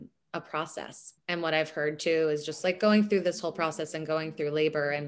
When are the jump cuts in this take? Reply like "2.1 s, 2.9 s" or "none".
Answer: 1.1 s